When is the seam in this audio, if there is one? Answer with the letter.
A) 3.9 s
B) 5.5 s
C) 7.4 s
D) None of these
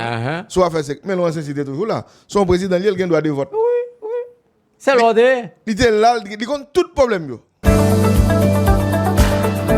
C